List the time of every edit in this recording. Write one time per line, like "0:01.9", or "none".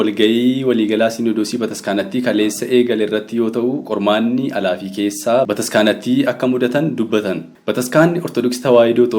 0:05.5
0:07.5